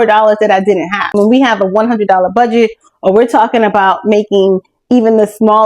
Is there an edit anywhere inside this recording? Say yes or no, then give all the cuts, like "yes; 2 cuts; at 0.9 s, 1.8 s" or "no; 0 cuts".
yes; 1 cut; at 1.1 s